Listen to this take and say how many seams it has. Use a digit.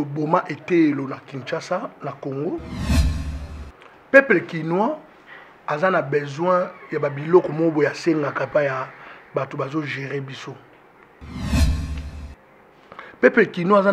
0